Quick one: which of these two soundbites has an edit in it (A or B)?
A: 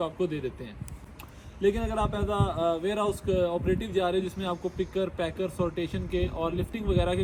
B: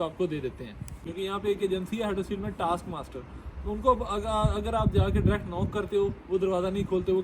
B